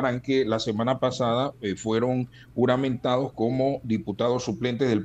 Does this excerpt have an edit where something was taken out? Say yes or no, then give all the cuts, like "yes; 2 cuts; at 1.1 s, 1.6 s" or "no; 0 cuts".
no; 0 cuts